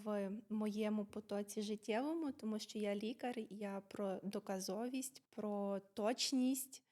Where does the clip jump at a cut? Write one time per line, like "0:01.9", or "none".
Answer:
0:05.2